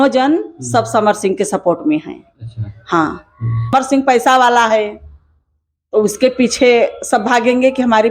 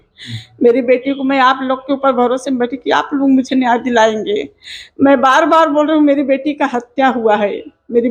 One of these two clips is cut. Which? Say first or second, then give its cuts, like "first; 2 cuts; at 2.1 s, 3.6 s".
first; 1 cut; at 3.7 s